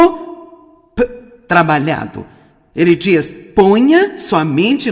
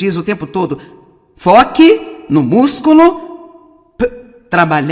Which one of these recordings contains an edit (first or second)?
second